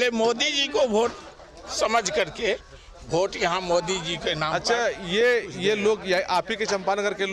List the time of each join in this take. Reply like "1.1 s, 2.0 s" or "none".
none